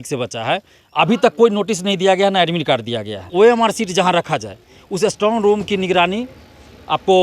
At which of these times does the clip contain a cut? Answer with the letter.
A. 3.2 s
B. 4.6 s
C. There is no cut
A